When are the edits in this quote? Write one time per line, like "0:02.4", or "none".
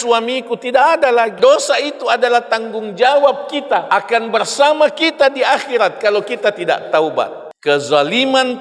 0:01.4
0:03.8
0:07.5